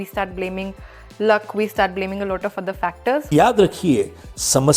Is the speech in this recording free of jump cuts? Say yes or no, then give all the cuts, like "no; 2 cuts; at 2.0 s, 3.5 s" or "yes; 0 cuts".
no; 1 cut; at 3.3 s